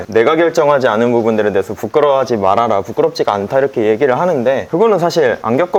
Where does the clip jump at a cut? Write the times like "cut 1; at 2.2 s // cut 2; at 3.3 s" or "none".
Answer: none

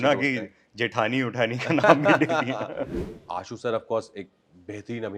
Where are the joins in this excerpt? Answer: cut 1; at 3.0 s

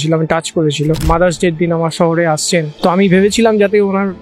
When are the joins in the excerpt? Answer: cut 1; at 1.0 s // cut 2; at 2.7 s

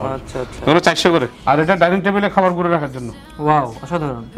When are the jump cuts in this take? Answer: cut 1; at 1.3 s

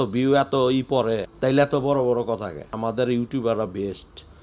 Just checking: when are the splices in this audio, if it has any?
cut 1; at 1.3 s // cut 2; at 2.7 s

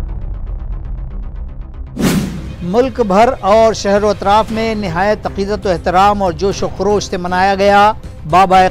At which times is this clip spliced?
cut 1; at 2.4 s

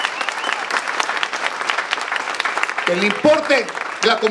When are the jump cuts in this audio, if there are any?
none

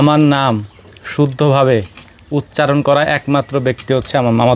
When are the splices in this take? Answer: none

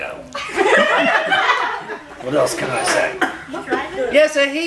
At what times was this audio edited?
none

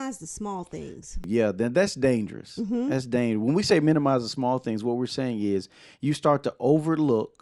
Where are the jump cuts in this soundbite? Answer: cut 1; at 1.2 s

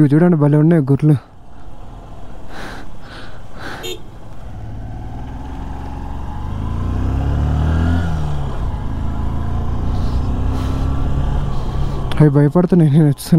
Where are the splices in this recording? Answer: none

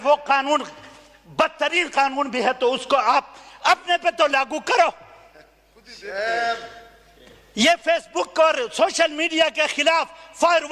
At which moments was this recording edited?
none

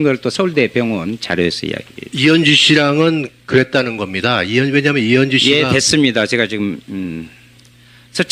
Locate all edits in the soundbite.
none

